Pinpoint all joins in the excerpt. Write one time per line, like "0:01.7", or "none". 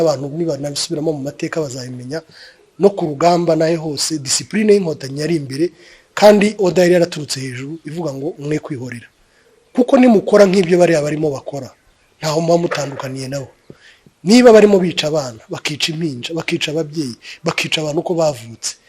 0:17.7